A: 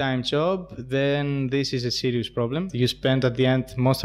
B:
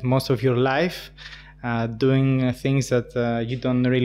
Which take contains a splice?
A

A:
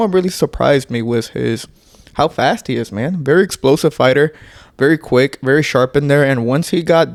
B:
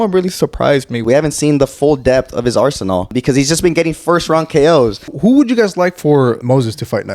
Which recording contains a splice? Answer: B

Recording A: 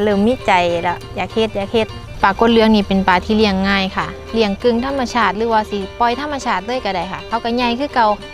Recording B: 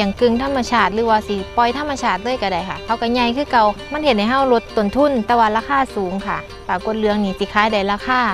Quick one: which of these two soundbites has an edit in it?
A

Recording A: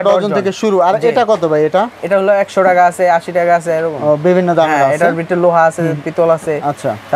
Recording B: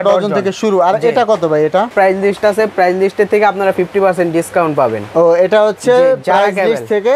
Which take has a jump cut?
B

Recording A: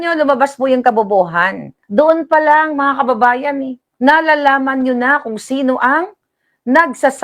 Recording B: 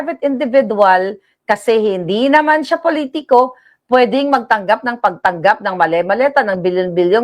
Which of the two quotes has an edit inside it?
A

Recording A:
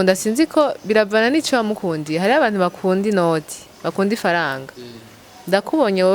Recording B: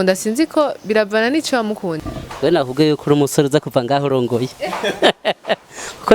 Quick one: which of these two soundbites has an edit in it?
B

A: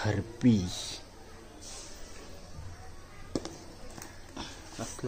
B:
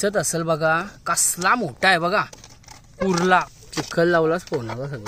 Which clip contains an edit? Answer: B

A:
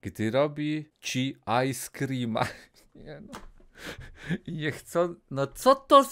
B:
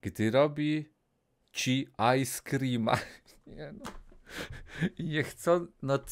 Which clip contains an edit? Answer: A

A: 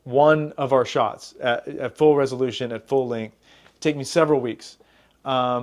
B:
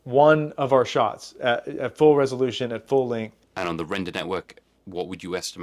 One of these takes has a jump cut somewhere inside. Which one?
B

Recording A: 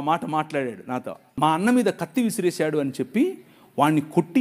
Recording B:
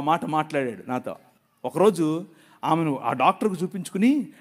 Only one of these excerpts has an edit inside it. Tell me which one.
A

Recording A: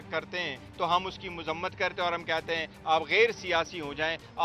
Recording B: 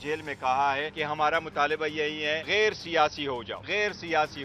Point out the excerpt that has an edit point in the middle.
B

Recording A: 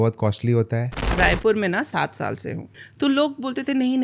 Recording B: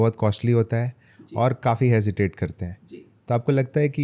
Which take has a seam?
A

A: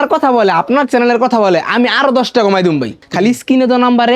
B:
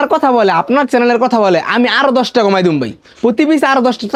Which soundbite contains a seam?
A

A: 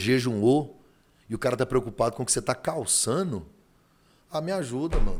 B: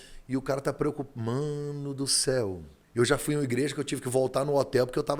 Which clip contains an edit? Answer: B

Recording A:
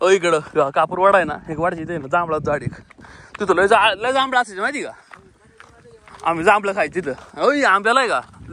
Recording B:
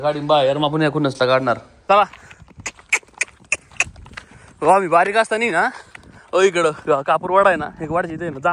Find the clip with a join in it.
B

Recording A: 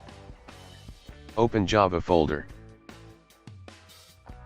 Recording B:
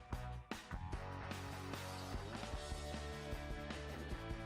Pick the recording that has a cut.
A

